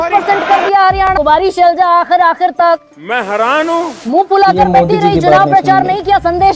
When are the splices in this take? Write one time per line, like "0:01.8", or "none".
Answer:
0:01.1